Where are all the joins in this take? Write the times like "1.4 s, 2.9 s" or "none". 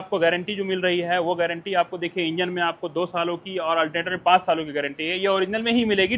none